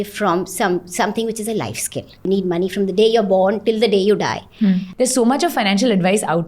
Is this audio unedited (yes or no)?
no